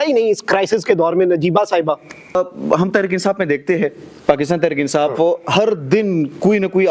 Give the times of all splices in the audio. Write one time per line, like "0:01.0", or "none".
0:02.4

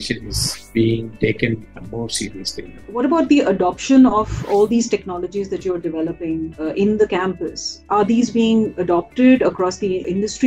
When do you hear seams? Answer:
none

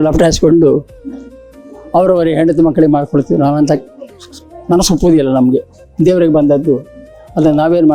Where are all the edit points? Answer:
none

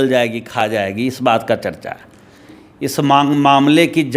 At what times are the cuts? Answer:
0:02.6

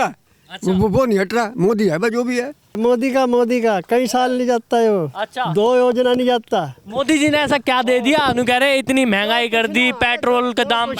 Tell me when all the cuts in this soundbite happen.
0:02.8

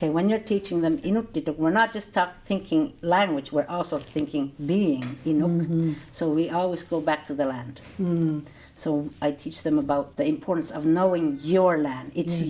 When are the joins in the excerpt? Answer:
0:01.0

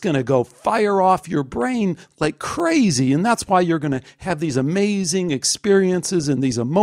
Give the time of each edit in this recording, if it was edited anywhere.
none

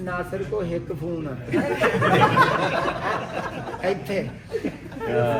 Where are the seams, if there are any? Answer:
none

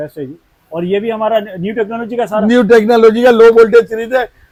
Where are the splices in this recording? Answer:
none

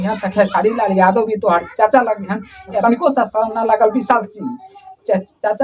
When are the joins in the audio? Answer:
0:02.8

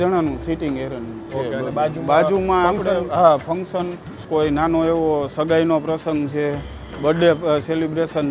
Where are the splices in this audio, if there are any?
none

